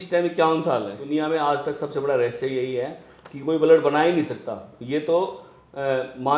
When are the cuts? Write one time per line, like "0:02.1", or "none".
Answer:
0:01.0